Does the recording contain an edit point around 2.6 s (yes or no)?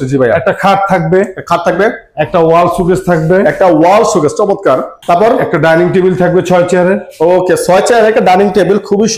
no